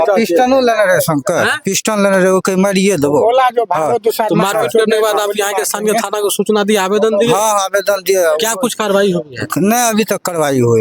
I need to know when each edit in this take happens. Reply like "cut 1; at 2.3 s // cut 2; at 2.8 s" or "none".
none